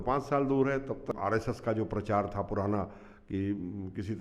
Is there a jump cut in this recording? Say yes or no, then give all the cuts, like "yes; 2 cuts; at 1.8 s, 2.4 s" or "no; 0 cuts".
yes; 1 cut; at 1.1 s